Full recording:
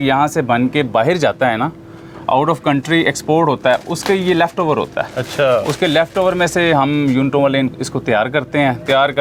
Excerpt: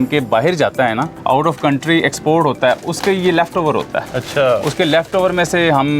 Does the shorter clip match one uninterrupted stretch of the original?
no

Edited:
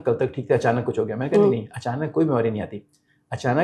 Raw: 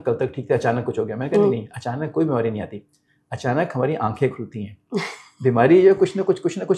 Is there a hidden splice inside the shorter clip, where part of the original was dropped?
no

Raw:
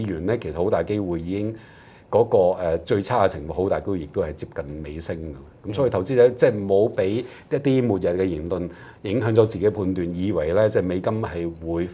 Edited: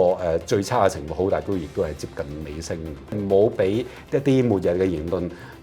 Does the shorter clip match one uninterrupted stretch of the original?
no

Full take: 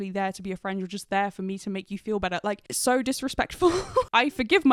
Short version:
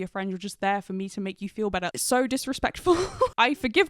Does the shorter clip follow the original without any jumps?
no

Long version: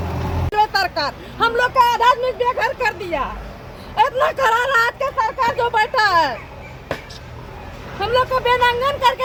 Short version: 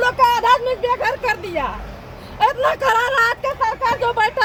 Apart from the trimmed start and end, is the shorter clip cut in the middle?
no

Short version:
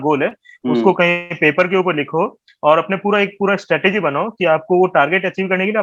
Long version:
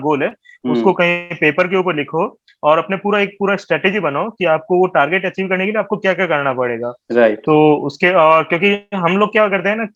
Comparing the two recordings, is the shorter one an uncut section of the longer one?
yes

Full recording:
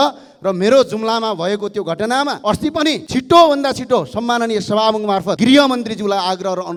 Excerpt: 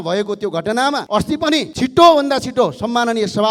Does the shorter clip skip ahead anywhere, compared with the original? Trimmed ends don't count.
no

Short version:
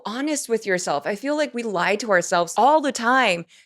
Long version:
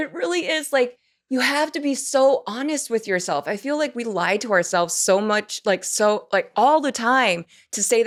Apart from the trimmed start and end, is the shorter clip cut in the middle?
yes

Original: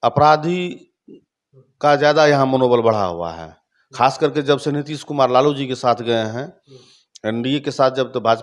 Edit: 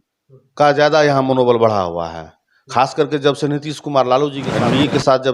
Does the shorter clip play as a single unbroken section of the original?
no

